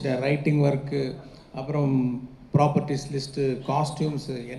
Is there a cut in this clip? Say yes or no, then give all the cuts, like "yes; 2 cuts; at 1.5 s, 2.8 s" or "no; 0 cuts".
no; 0 cuts